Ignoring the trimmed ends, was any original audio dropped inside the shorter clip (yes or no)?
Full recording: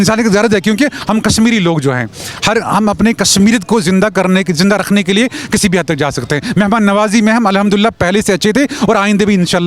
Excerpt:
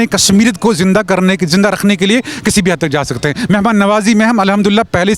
no